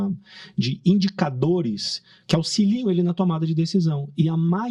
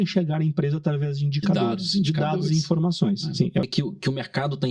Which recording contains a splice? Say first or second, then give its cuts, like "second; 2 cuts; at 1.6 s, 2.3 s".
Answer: second; 1 cut; at 3.7 s